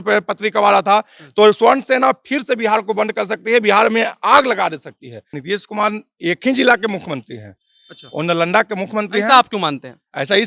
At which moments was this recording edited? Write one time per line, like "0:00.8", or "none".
0:05.3